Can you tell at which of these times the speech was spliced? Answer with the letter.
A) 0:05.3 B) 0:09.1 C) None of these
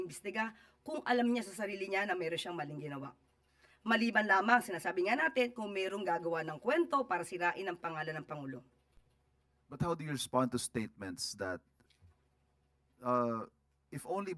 C